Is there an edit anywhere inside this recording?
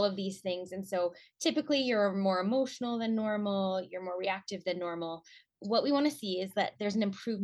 yes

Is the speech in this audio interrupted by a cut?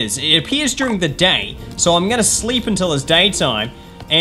no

